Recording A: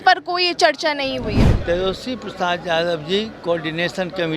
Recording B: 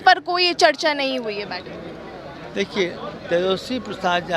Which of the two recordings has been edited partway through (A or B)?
A